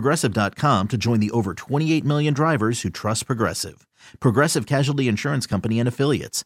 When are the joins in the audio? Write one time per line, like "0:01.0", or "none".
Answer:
none